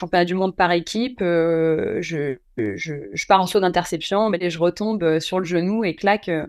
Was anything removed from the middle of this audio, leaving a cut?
yes; 1 cut; at 4.4 s

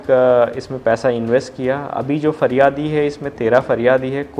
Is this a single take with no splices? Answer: yes; 0 cuts

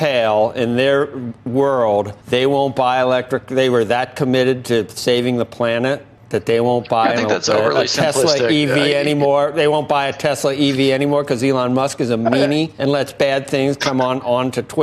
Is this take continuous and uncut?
no; 3 cuts; at 2.2 s, 6.1 s, 12.7 s

